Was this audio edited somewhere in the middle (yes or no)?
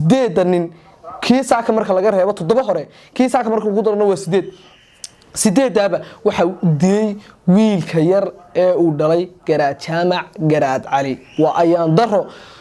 no